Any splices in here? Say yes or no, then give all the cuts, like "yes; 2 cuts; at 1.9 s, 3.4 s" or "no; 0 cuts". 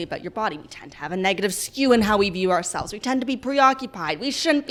no; 0 cuts